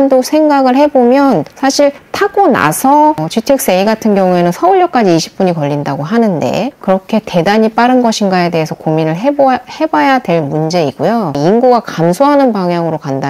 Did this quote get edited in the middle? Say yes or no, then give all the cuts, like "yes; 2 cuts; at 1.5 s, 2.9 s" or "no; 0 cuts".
yes; 2 cuts; at 6.8 s, 11.4 s